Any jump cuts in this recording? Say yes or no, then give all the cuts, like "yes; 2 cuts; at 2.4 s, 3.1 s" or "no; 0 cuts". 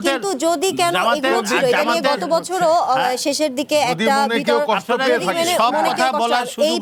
no; 0 cuts